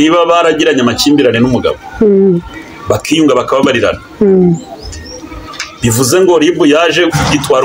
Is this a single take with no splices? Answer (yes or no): yes